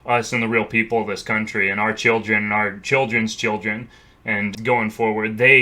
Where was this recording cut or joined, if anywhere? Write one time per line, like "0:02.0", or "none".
0:04.6